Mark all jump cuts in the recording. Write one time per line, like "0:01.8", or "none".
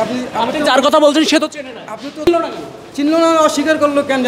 0:02.3